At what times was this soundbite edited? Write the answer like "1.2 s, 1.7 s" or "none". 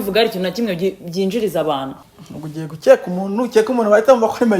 1.9 s